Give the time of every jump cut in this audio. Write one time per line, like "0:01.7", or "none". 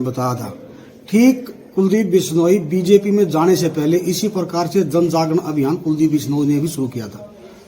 none